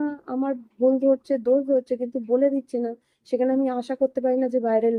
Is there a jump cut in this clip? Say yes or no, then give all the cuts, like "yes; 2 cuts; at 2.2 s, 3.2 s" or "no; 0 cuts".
no; 0 cuts